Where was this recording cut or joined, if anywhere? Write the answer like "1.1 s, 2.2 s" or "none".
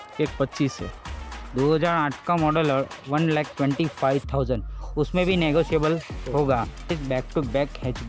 none